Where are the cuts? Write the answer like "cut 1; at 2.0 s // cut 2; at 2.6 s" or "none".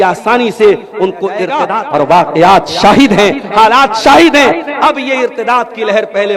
cut 1; at 1.7 s